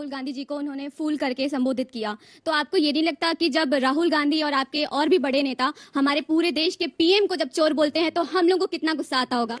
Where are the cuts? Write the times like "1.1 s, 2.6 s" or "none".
none